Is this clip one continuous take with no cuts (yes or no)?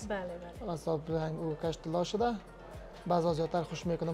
yes